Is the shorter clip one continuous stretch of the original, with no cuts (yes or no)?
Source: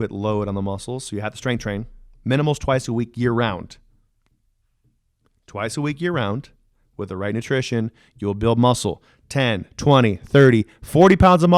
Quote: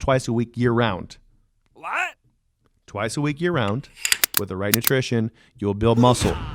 yes